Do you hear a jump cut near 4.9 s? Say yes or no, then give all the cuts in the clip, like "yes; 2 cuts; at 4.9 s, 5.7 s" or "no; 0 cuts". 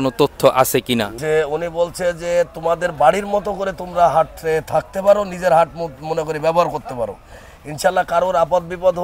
no; 1 cut; at 1.1 s